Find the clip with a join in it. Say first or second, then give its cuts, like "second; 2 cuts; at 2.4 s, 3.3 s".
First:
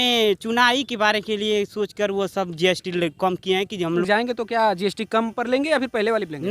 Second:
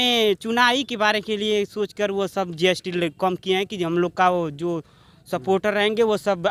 first; 1 cut; at 4.0 s